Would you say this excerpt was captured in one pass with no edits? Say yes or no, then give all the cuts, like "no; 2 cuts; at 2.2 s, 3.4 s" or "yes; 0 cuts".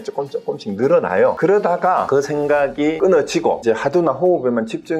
no; 4 cuts; at 1.4 s, 2.1 s, 3.0 s, 3.6 s